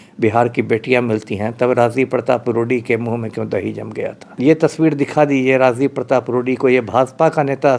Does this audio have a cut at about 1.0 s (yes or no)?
no